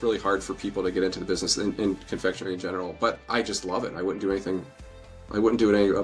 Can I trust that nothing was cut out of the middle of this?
yes; 0 cuts

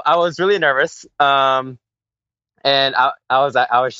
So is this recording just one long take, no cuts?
yes; 0 cuts

